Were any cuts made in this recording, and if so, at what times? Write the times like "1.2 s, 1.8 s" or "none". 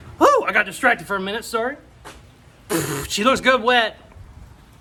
none

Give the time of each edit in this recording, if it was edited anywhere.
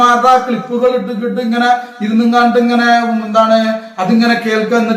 none

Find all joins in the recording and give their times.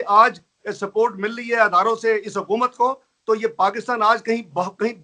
none

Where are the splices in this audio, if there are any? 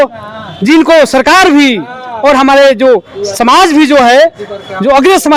none

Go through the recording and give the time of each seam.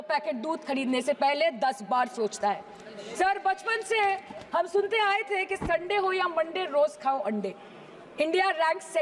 none

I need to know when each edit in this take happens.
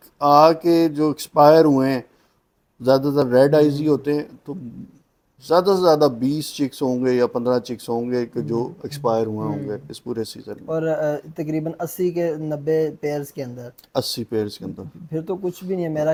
none

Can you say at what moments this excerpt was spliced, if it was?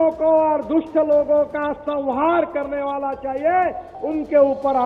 3.9 s

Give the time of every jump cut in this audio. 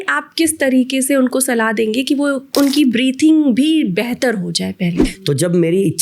2.5 s, 5.0 s

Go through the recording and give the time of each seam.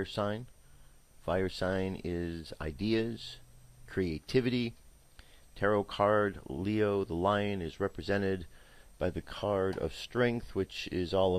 none

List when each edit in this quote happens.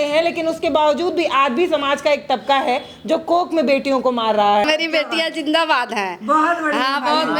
4.6 s

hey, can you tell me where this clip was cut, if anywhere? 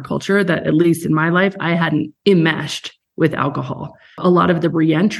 2.1 s, 4.2 s

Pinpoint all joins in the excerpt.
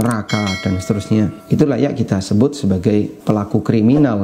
1.4 s, 3.2 s

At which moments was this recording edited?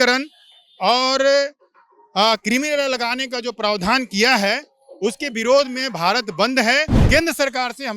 7.0 s

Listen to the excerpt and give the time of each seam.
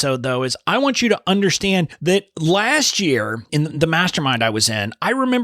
1.9 s, 3.5 s

